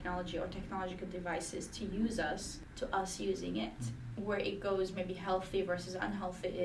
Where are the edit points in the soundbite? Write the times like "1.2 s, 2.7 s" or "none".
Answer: 2.6 s, 4.2 s

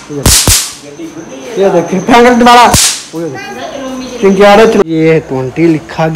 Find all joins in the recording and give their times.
4.8 s

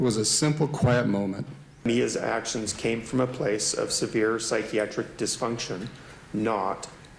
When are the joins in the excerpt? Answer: 1.8 s

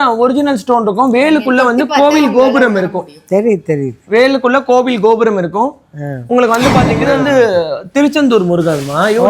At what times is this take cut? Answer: 6.9 s

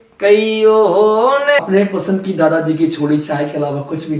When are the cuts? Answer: 1.6 s

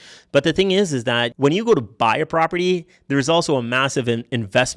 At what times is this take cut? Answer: 1.3 s

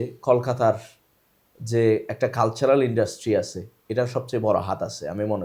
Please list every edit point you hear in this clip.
none

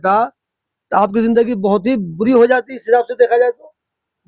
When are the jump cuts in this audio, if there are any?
none

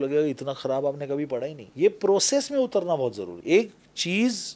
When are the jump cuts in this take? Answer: 1.6 s, 3.3 s

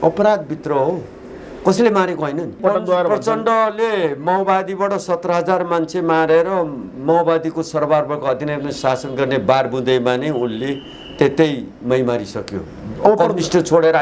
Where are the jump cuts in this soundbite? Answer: 2.6 s

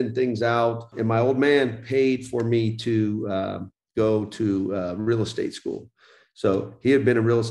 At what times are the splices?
0.9 s

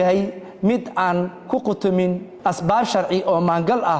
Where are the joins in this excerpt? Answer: 2.3 s

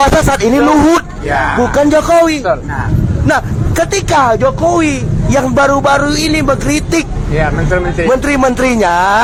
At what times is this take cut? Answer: none

